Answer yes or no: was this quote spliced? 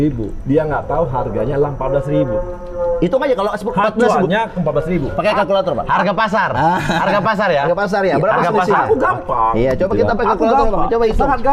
no